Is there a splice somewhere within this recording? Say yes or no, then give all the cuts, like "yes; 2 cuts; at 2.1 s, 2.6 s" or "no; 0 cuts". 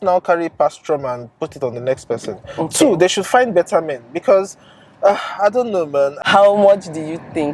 yes; 1 cut; at 6.2 s